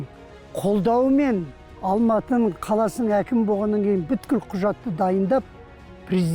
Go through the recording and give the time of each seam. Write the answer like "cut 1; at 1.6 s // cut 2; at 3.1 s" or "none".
cut 1; at 1.7 s // cut 2; at 2.6 s